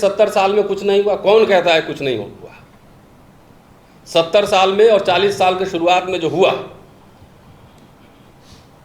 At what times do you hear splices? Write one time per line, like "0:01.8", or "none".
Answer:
none